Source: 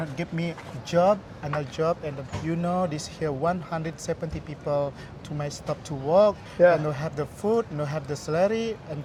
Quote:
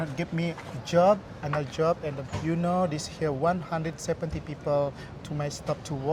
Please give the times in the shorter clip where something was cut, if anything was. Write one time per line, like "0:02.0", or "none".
none

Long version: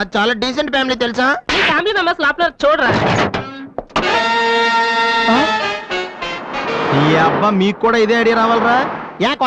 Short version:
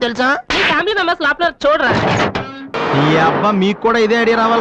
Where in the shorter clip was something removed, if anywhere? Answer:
0:02.7

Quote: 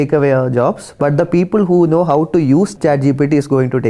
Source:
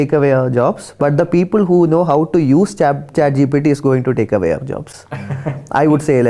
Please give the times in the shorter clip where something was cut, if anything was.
0:02.7

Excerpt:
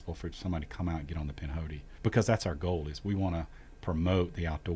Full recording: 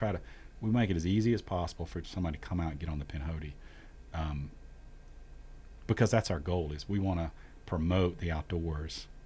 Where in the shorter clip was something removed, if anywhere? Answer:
0:01.8

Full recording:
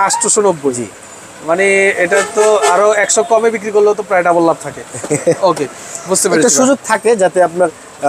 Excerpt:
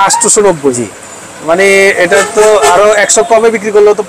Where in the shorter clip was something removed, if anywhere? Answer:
none

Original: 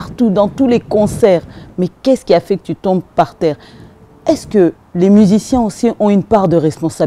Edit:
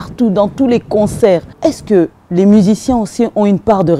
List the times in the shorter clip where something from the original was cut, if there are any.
0:01.5

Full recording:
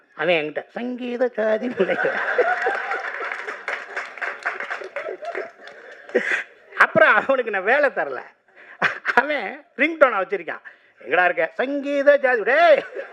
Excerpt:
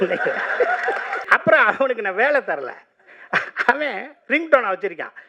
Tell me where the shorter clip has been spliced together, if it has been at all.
0:01.1

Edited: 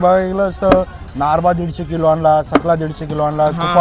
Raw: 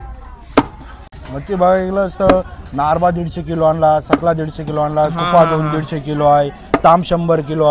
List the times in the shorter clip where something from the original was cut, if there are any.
none

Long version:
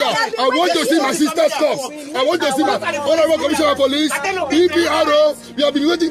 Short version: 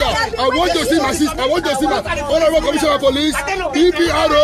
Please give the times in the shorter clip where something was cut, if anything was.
0:01.3

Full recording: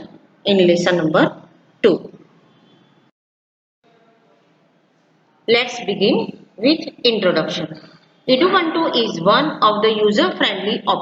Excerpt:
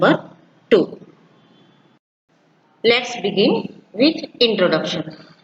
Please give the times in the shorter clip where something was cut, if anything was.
0:02.3

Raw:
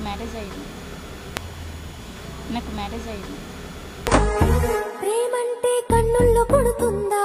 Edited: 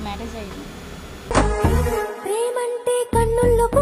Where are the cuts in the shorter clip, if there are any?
0:01.2

